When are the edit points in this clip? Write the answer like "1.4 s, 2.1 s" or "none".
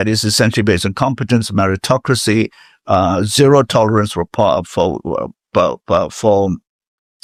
none